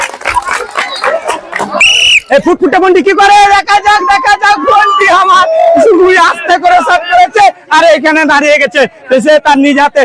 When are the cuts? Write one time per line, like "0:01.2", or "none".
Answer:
0:01.8